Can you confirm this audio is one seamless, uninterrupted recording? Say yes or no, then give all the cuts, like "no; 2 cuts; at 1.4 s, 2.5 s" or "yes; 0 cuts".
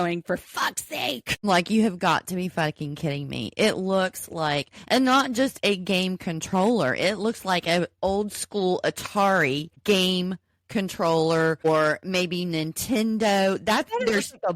no; 2 cuts; at 9.7 s, 11.6 s